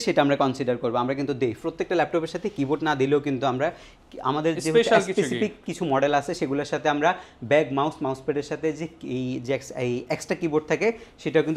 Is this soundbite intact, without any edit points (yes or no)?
yes